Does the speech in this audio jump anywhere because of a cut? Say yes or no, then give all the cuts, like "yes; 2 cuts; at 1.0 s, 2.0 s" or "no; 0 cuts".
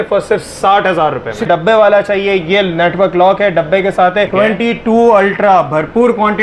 yes; 2 cuts; at 1.5 s, 4.3 s